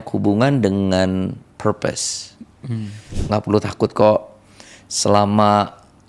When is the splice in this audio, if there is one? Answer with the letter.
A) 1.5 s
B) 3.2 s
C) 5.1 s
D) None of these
B